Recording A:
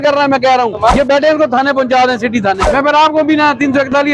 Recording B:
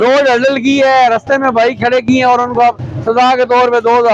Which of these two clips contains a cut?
A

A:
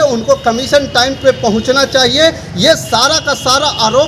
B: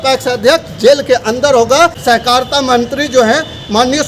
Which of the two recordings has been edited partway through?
B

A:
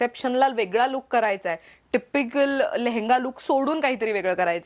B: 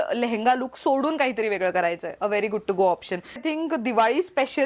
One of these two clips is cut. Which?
B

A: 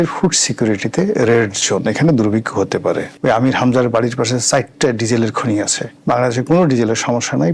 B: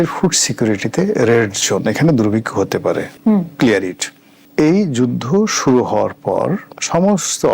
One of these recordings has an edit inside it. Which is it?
A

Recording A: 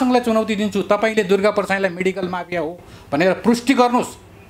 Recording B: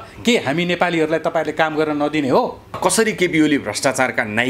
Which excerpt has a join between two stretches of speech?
B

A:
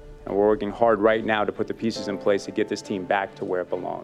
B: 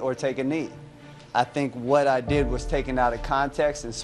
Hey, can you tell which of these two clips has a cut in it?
B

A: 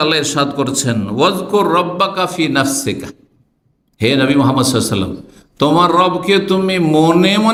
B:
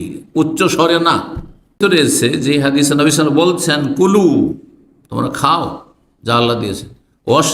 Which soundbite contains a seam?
B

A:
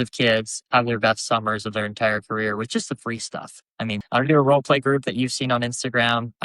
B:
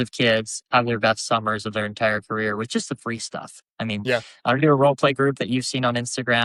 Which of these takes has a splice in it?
A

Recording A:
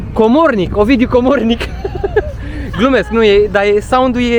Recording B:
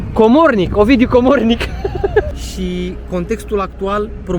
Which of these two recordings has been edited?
B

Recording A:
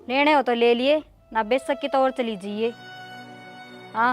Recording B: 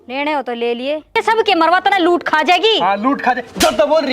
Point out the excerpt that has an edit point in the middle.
B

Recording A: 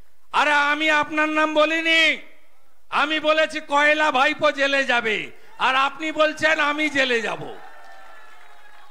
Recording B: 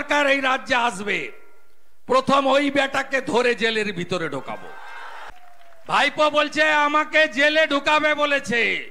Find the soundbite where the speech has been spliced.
B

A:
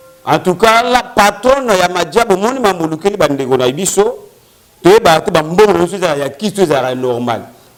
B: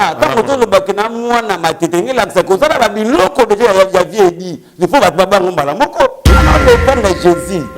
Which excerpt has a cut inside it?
B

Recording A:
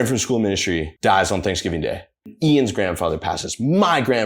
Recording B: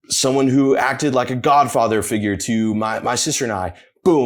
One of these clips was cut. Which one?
A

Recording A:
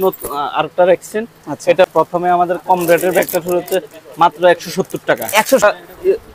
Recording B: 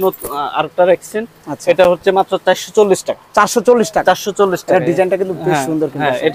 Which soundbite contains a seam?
A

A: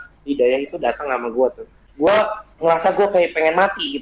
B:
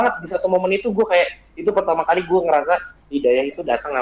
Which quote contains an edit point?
A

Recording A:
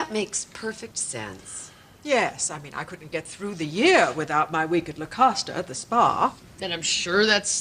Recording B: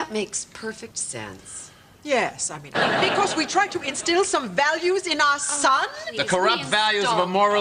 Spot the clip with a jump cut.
A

